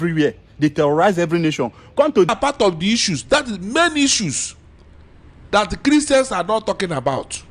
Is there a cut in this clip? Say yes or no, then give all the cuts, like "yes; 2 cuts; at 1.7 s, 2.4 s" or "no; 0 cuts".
yes; 1 cut; at 2.3 s